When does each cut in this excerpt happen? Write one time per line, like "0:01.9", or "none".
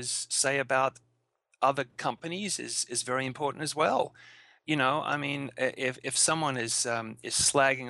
none